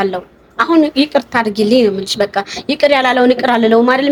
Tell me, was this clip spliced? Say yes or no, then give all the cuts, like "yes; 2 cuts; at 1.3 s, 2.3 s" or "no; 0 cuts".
no; 0 cuts